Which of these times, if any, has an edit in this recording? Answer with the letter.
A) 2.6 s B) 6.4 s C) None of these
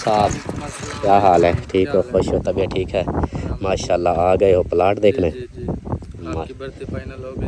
C